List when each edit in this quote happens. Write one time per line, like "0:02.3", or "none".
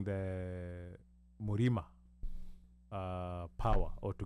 none